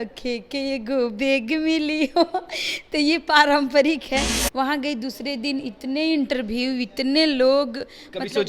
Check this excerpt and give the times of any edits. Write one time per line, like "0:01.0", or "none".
0:04.3